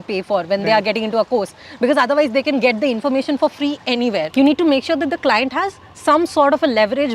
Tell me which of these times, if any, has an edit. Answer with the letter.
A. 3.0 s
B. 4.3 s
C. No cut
B